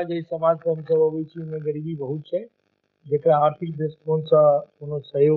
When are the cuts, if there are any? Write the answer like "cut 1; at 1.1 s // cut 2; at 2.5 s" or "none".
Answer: none